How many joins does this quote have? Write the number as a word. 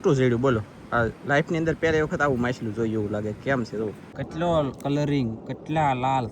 one